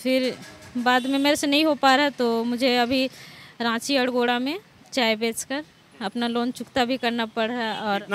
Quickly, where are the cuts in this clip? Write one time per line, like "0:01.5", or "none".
none